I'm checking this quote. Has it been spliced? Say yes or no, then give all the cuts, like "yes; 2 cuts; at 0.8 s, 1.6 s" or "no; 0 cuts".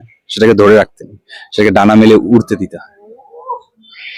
no; 0 cuts